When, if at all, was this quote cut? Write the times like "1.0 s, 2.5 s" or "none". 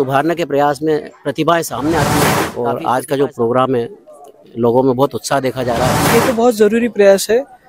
2.4 s, 6.0 s